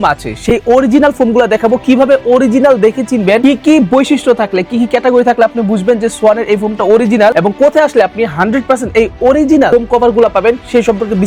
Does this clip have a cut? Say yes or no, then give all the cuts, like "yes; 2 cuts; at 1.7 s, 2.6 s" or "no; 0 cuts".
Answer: no; 0 cuts